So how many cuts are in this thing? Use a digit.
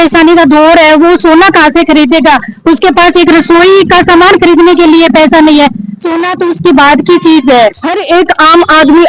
1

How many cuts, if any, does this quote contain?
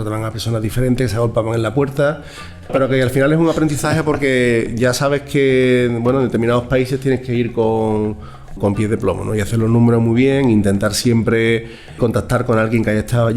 3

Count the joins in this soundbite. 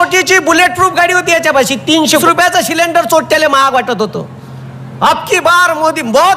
1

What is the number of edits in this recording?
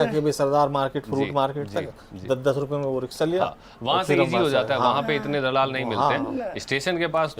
0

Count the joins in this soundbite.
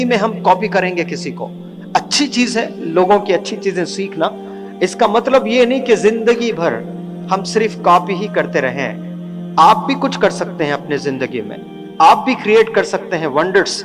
0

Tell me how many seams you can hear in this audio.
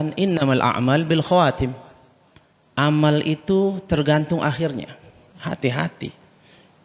1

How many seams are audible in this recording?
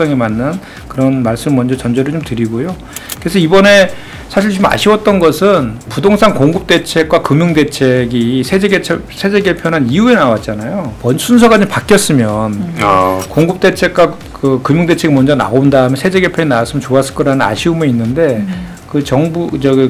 0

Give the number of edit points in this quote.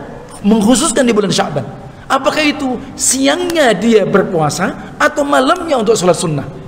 0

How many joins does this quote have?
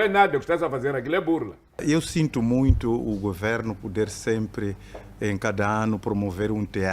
1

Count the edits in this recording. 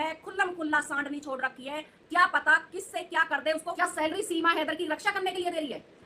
1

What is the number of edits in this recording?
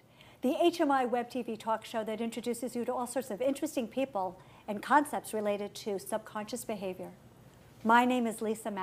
0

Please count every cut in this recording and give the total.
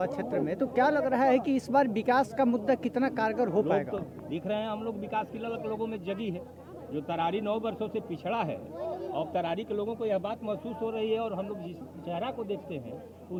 0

